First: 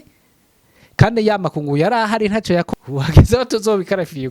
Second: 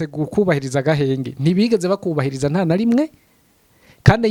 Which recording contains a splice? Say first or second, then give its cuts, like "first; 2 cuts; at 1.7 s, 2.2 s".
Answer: first; 1 cut; at 2.7 s